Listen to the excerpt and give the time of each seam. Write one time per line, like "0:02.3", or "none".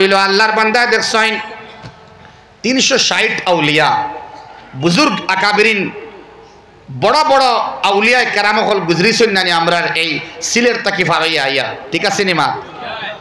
none